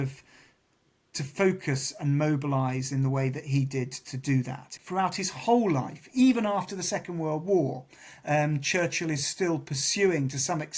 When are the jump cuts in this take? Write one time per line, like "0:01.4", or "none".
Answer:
0:04.8